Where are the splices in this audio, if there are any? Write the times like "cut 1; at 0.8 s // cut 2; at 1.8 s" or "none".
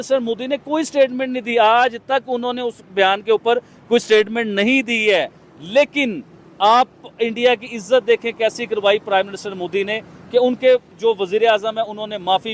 none